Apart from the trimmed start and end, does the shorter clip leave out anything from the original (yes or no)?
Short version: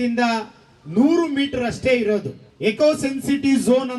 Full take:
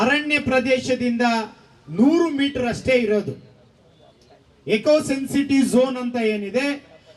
yes